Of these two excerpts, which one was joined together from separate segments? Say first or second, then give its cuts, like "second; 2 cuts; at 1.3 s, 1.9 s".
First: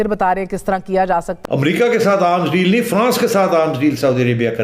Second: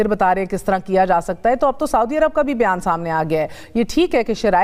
first; 1 cut; at 1.3 s